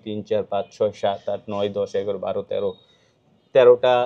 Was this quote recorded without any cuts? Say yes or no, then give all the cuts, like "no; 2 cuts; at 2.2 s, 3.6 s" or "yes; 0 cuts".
yes; 0 cuts